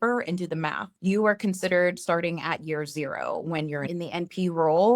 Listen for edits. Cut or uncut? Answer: cut